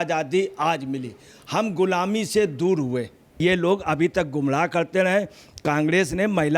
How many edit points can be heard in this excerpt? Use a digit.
1